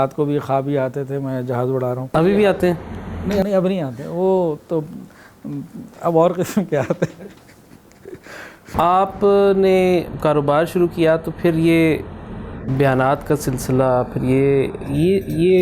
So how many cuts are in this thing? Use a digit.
2